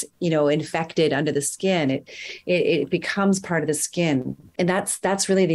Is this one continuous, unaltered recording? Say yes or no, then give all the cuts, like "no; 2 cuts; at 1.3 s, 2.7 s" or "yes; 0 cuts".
no; 1 cut; at 4.5 s